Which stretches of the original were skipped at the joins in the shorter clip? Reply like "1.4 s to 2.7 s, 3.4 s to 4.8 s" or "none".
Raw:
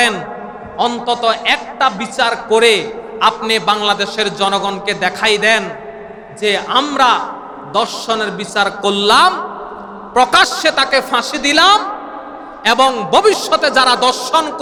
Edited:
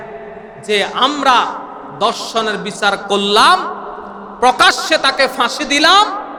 none